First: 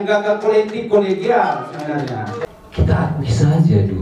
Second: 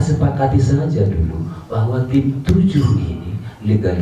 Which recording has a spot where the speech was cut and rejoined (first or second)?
first